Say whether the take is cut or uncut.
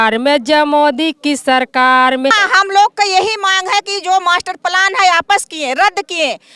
cut